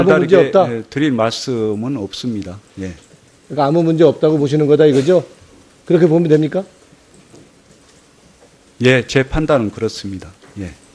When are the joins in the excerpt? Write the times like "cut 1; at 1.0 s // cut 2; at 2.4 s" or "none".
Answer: none